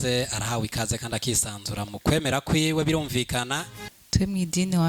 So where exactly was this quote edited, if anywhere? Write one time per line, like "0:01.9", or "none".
0:04.0

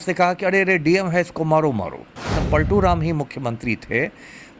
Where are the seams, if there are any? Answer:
0:02.4

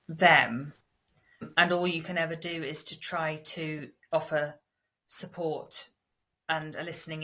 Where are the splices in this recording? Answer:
0:01.5

